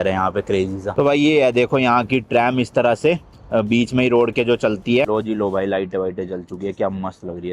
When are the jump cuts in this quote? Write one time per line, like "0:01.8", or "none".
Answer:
0:00.9
0:05.1